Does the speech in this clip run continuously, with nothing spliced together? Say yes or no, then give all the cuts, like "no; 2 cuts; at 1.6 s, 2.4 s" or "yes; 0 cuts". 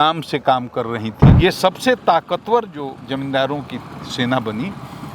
no; 1 cut; at 1.3 s